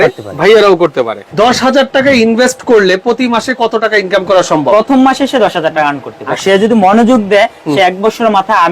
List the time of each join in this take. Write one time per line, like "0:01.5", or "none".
0:01.2
0:04.7
0:06.3